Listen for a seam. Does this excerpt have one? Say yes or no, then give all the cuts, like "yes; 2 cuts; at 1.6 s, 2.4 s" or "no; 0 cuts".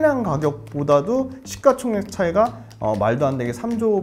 no; 0 cuts